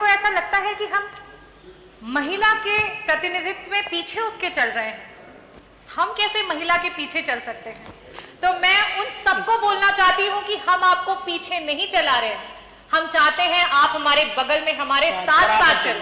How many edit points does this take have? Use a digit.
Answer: 0